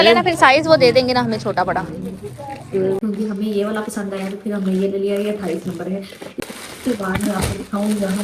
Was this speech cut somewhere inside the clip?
yes; 2 cuts; at 3.0 s, 6.3 s

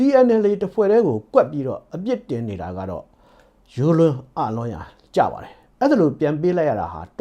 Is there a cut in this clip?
no; 0 cuts

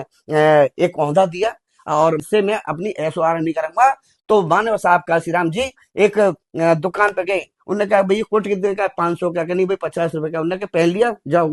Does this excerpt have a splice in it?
yes; 1 cut; at 2.2 s

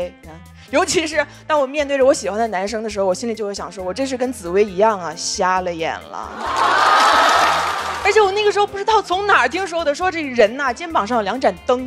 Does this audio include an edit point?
yes; 1 cut; at 7.7 s

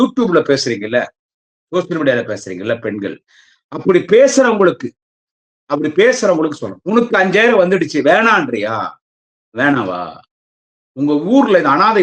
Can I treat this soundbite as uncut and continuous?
no; 1 cut; at 6.7 s

